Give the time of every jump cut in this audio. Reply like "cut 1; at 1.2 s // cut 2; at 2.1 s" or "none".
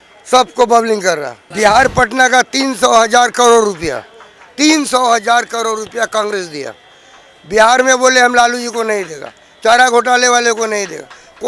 cut 1; at 1.4 s

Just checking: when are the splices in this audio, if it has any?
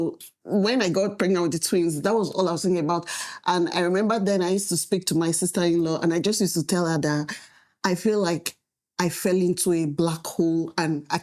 none

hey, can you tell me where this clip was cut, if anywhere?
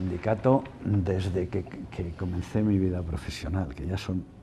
none

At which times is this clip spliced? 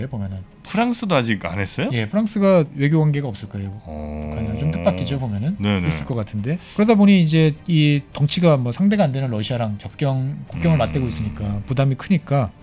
cut 1; at 2.7 s // cut 2; at 6.7 s

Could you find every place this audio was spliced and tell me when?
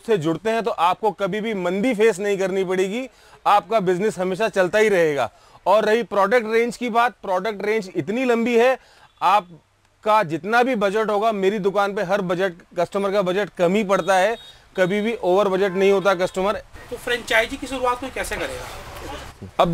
none

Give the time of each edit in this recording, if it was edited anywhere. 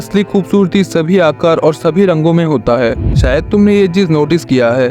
cut 1; at 3.2 s

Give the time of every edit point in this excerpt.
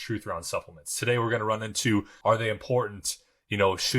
cut 1; at 2.1 s

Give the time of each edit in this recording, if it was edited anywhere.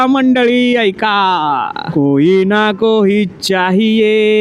cut 1; at 1.8 s

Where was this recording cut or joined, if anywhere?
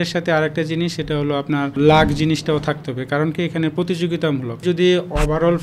cut 1; at 1.7 s // cut 2; at 4.6 s

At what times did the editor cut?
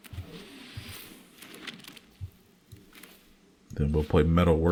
none

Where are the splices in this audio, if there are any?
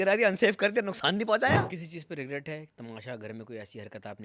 cut 1; at 1.7 s

